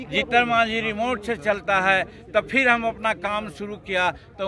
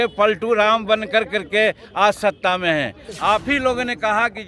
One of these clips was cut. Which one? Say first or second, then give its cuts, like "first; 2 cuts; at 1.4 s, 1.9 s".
second; 1 cut; at 3.0 s